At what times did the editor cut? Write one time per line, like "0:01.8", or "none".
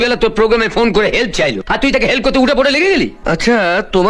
0:03.2